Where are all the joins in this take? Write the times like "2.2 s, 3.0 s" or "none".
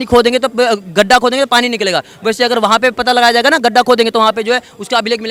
none